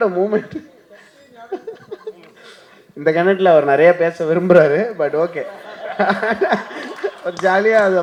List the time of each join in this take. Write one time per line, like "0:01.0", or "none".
none